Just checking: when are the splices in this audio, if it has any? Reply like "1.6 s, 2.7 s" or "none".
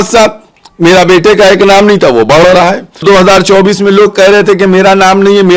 3.0 s